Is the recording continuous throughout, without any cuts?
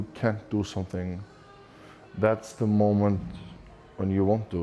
yes; 0 cuts

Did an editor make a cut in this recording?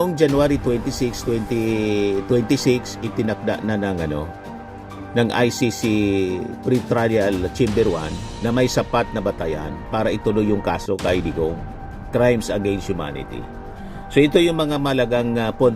no; 0 cuts

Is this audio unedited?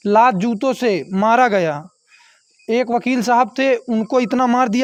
yes; 0 cuts

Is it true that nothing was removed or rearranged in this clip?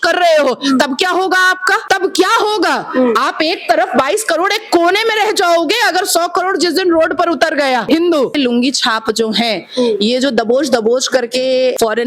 no; 2 cuts; at 1.8 s, 7.9 s

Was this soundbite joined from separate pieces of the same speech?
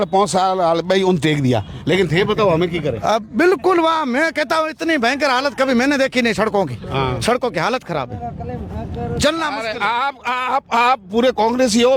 no; 0 cuts

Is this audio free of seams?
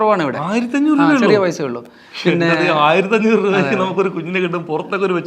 yes; 0 cuts

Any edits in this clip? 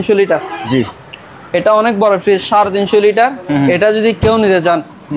no; 0 cuts

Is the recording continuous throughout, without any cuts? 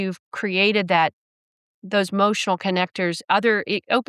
yes; 0 cuts

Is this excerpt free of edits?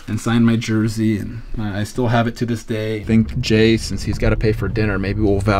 no; 1 cut; at 3.0 s

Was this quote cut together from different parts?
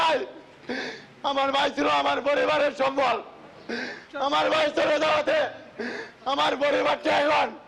no; 0 cuts

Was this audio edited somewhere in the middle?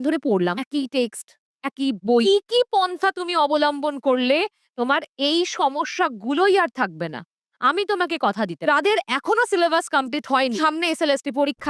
yes; 3 cuts; at 2.2 s, 8.6 s, 10.6 s

